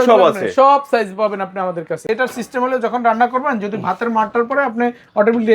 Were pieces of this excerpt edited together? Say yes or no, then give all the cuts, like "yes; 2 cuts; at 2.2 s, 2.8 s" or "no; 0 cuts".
yes; 1 cut; at 2.0 s